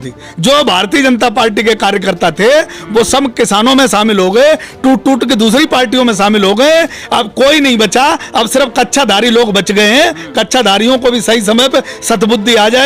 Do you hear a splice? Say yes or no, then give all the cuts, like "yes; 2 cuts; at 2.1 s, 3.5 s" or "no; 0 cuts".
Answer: no; 0 cuts